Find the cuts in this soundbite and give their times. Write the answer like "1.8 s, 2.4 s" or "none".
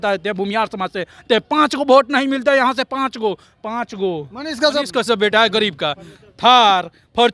4.9 s